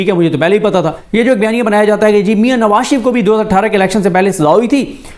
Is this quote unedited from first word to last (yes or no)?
no